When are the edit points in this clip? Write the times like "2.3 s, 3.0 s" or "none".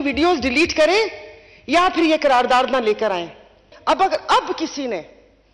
3.7 s